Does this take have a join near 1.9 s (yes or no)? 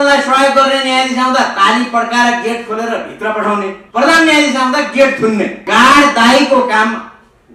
no